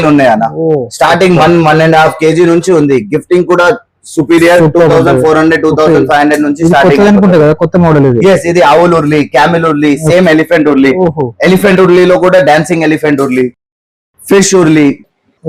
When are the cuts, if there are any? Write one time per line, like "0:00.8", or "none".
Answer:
none